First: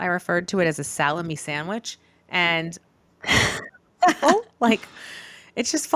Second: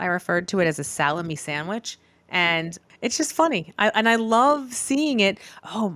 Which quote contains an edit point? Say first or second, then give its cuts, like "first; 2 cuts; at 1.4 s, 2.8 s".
second; 1 cut; at 2.8 s